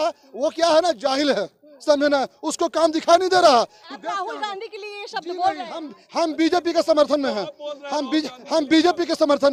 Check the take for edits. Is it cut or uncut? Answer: uncut